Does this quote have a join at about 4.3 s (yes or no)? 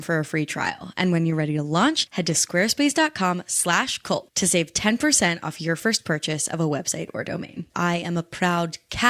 no